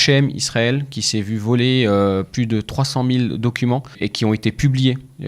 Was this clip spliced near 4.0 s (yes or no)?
yes